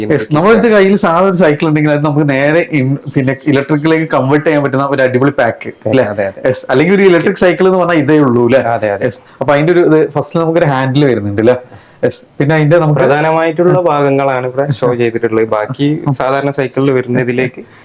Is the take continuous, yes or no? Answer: yes